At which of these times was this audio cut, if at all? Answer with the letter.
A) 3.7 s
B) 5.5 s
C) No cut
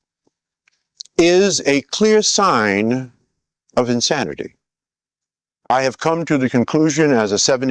B